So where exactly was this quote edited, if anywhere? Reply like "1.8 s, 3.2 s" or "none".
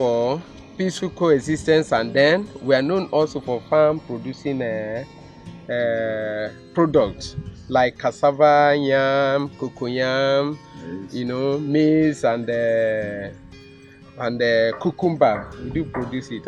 none